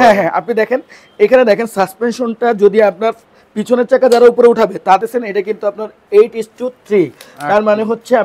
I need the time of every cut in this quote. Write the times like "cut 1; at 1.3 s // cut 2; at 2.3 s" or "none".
cut 1; at 5.0 s